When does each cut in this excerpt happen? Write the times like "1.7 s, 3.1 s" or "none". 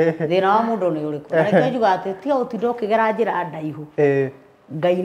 none